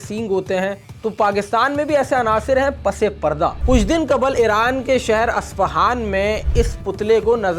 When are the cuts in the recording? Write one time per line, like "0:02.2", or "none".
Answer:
0:00.8
0:03.6